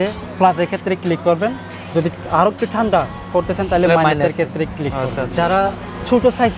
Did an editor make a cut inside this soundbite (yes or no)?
yes